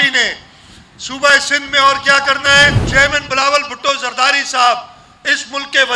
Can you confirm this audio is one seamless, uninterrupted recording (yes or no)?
no